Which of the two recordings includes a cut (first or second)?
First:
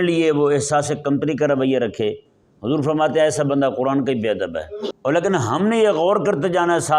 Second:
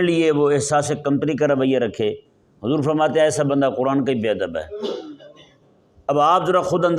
first